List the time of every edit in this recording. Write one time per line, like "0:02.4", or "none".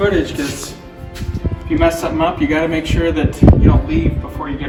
none